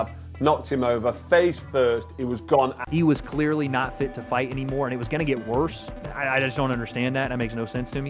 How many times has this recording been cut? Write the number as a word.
one